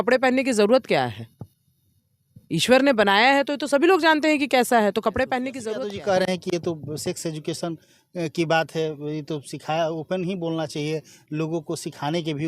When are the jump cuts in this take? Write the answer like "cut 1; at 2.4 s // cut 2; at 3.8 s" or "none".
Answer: cut 1; at 5.6 s

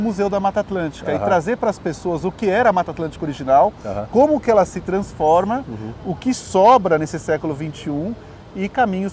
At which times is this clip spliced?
none

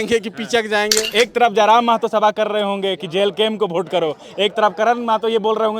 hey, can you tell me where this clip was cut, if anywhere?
cut 1; at 1.1 s

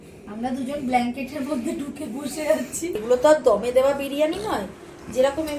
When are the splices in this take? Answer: cut 1; at 3.0 s

